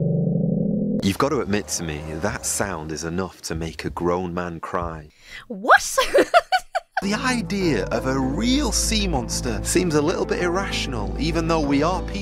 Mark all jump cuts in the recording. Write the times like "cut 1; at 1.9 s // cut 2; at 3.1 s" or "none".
cut 1; at 1.0 s // cut 2; at 5.0 s // cut 3; at 7.0 s